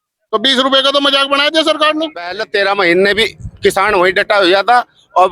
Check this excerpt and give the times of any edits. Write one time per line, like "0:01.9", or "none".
0:02.4

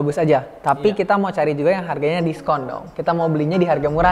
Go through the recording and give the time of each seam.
none

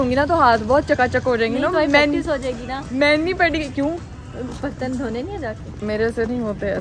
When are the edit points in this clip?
none

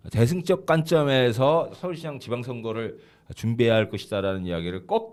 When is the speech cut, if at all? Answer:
none

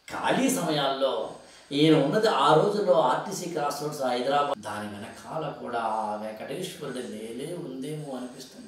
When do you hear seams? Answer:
0:04.5

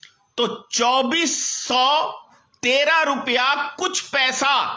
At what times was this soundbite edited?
none

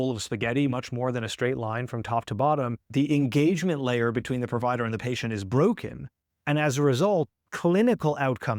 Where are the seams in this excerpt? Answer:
0:02.8

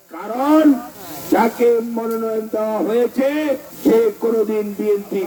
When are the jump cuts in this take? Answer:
none

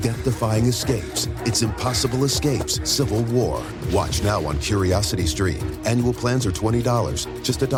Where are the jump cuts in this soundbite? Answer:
none

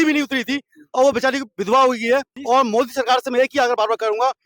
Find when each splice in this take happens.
0:02.3

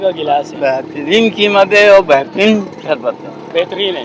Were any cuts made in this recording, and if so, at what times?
none

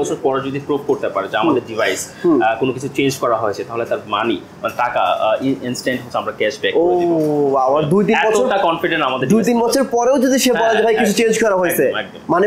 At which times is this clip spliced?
none

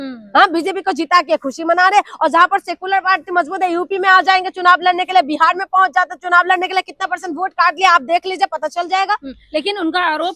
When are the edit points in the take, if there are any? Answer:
none

